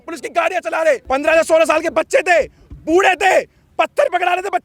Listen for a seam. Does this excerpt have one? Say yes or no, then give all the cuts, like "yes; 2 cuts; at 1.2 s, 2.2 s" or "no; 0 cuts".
yes; 1 cut; at 1.0 s